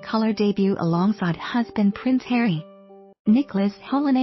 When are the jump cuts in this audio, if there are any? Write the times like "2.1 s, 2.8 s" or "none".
3.3 s